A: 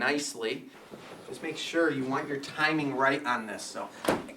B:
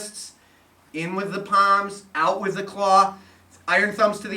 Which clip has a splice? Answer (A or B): A